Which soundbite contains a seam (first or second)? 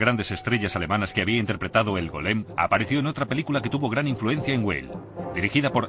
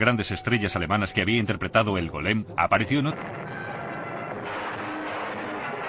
first